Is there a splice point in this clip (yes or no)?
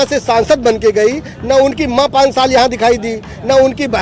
no